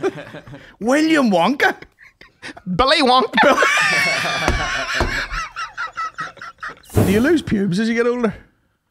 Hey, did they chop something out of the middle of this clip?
yes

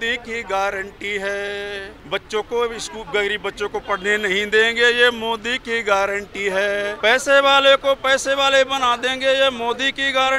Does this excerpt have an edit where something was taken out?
yes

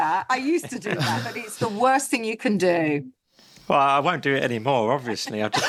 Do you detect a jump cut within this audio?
no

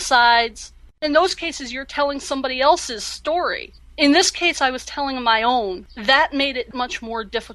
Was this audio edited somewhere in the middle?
yes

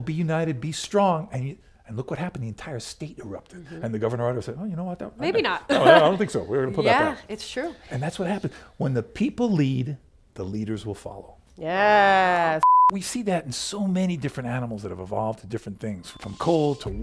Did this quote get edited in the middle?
yes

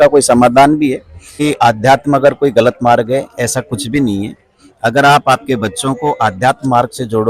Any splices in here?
yes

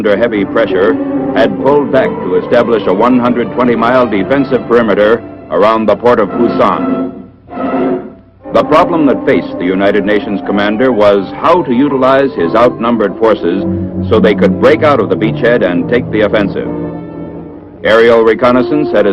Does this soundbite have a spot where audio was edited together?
yes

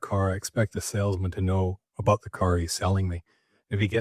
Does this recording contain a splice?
yes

